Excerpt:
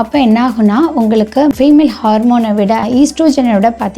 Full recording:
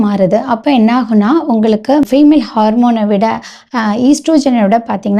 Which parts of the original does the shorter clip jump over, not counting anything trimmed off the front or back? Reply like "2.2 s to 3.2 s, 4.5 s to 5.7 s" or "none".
3.4 s to 3.9 s